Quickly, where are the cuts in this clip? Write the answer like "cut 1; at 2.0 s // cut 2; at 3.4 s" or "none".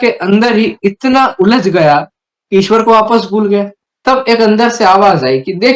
cut 1; at 3.8 s